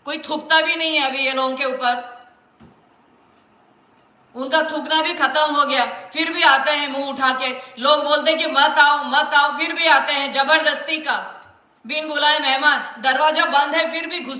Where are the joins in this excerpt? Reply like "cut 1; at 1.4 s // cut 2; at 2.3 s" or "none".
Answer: none